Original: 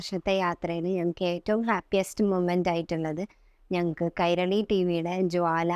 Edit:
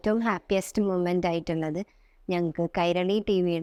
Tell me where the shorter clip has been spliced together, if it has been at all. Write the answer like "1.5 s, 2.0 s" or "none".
none